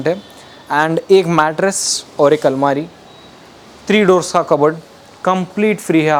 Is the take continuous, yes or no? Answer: yes